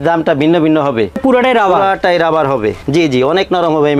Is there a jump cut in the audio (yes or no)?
yes